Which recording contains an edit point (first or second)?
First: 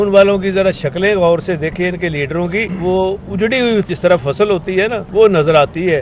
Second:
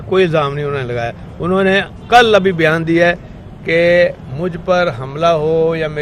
first